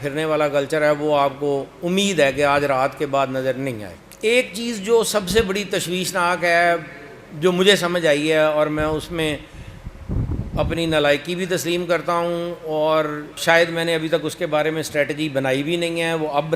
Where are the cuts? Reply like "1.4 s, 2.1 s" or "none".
none

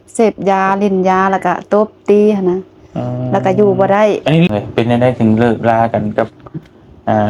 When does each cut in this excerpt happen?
4.5 s

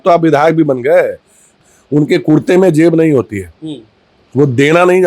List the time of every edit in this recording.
1.6 s

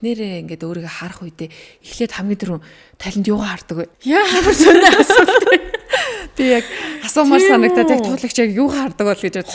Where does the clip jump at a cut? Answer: 3.9 s

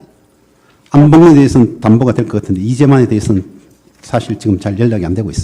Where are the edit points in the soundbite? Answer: 2.2 s

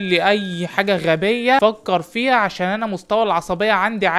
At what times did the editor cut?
1.6 s

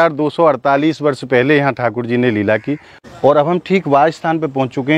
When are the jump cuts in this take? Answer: 2.9 s

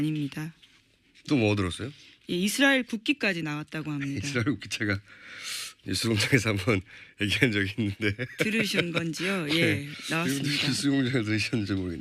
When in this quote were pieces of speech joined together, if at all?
7.0 s

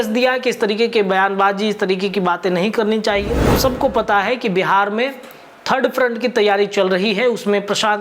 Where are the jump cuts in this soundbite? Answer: 3.6 s

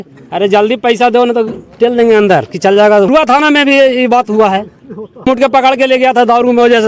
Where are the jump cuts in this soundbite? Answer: 3.1 s, 5.3 s

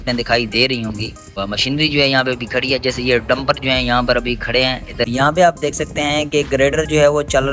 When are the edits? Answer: 1.3 s, 5.1 s

